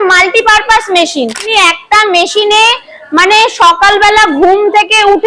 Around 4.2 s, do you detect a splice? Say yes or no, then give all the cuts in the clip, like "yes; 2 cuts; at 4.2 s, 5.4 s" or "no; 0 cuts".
no; 1 cut; at 1.4 s